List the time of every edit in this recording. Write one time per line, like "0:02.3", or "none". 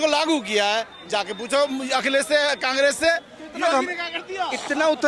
none